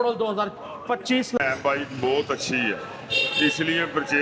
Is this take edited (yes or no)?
yes